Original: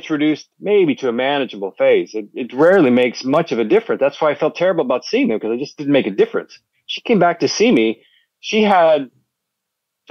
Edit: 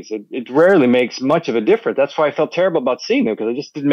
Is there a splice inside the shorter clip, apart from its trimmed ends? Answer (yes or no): no